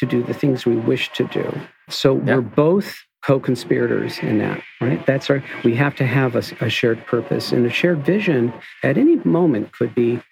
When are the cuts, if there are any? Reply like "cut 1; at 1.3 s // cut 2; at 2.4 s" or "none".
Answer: cut 1; at 1.9 s